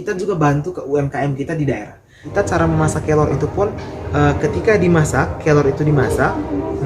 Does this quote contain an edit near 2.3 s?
yes; 1 cut; at 2.3 s

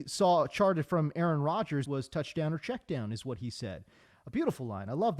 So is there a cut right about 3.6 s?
no; 1 cut; at 1.9 s

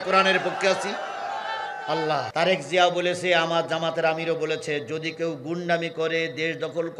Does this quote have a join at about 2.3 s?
yes; 1 cut; at 2.3 s

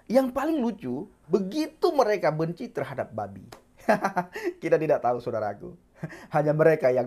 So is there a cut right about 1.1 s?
yes; 1 cut; at 1.1 s

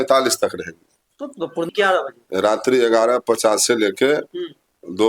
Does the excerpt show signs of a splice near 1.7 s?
yes; 1 cut; at 1.7 s

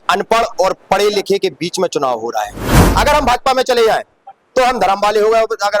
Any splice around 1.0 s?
no; 1 cut; at 2.7 s

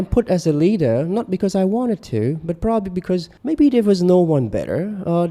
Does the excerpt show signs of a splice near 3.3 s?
yes; 1 cut; at 3.3 s

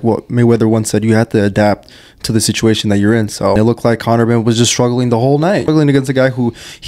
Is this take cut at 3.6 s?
yes; 2 cuts; at 3.6 s, 5.6 s

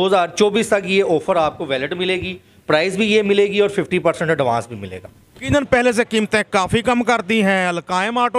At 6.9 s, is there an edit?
no; 1 cut; at 5.4 s

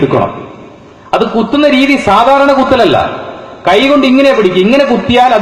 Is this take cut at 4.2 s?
no; 0 cuts

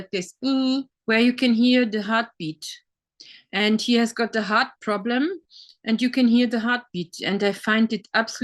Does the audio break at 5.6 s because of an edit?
no; 1 cut; at 0.9 s

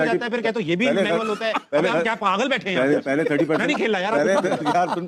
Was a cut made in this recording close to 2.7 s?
no; 0 cuts

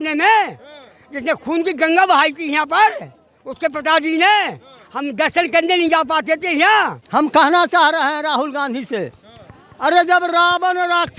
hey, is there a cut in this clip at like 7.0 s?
yes; 1 cut; at 7.0 s

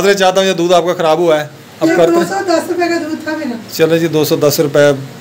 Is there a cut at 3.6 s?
no; 1 cut; at 1.9 s

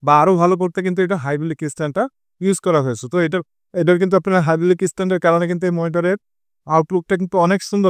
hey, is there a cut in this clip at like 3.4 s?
yes; 1 cut; at 3.4 s

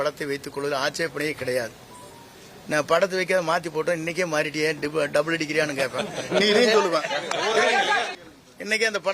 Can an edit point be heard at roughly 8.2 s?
yes; 1 cut; at 8.2 s

